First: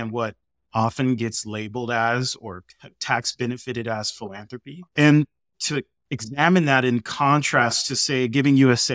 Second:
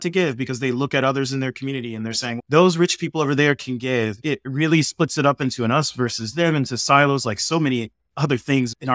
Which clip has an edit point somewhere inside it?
second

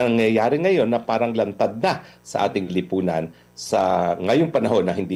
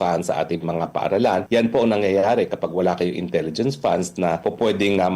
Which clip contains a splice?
second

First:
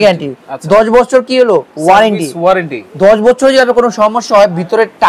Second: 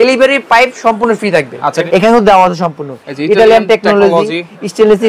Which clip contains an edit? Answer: second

